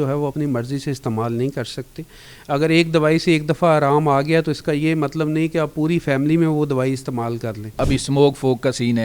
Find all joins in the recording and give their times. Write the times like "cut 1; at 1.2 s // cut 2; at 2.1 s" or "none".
cut 1; at 7.8 s

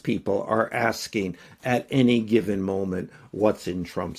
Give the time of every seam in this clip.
none

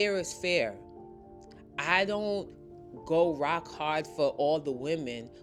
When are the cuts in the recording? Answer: none

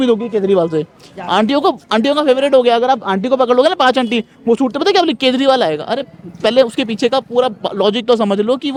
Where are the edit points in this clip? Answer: none

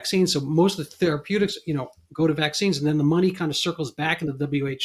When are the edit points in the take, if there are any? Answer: none

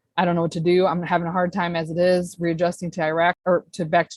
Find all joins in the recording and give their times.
none

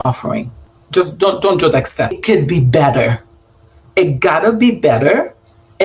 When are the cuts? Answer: cut 1; at 2.2 s

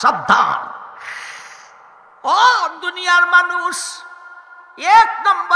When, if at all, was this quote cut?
cut 1; at 2.0 s

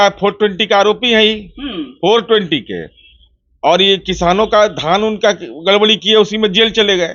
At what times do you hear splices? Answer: none

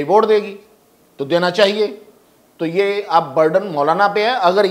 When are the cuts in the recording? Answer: none

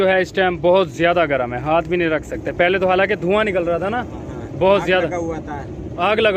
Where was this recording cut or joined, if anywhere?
none

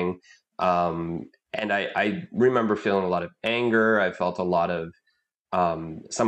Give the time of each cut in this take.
none

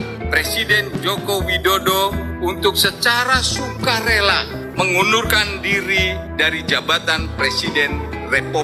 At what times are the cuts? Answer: none

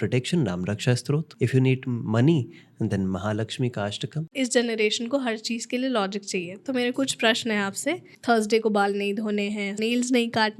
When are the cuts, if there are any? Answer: cut 1; at 1.3 s // cut 2; at 4.3 s // cut 3; at 8.1 s // cut 4; at 9.8 s

